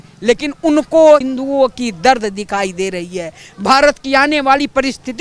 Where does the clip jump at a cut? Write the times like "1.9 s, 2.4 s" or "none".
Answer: 1.2 s